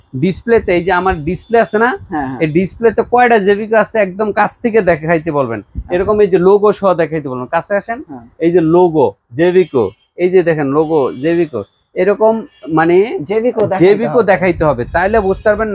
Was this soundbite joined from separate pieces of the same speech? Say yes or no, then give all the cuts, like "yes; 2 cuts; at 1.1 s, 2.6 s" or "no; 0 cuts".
no; 0 cuts